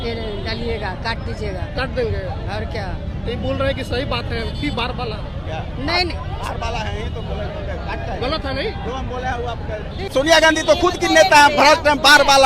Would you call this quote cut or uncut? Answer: uncut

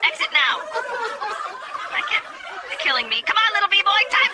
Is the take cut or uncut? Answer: uncut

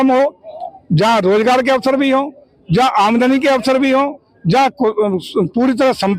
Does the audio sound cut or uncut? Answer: uncut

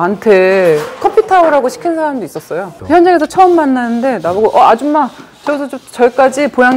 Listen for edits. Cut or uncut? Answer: uncut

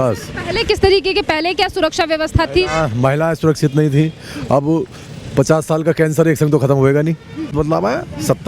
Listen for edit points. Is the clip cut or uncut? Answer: cut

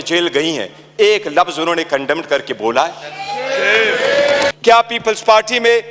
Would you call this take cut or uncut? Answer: cut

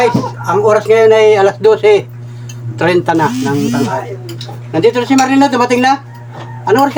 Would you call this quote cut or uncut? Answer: uncut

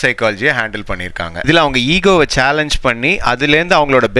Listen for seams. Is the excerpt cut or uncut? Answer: cut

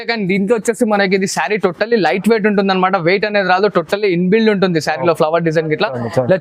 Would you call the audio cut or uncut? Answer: uncut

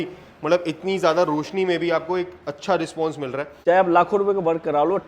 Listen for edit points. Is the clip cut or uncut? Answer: cut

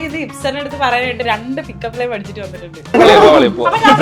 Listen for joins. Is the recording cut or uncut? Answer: cut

